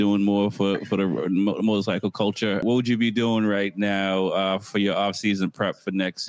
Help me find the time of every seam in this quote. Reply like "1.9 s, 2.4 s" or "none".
2.6 s